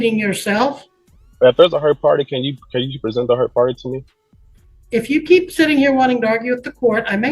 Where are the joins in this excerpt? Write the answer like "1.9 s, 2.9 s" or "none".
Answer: none